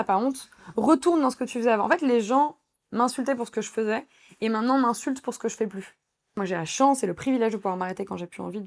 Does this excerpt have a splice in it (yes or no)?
yes